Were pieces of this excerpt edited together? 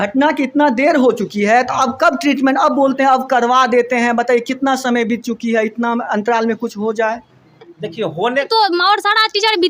yes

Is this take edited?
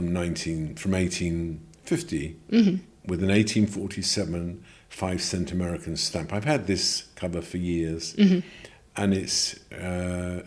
no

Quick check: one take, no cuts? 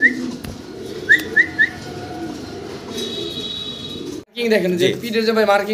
no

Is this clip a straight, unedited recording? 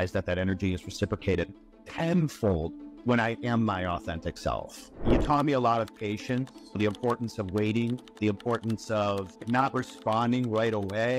no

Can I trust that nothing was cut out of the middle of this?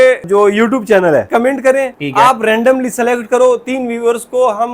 no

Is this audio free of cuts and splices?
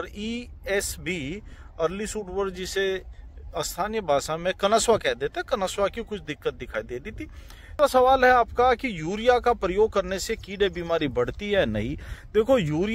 no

